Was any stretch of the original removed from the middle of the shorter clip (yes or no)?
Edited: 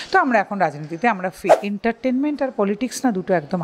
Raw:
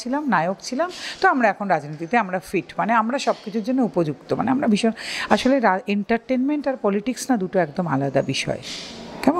yes